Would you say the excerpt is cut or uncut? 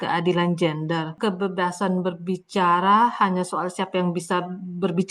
cut